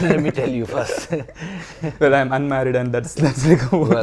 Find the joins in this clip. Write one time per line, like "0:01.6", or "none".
none